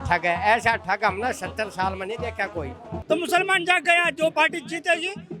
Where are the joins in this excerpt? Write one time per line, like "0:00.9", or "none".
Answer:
0:02.9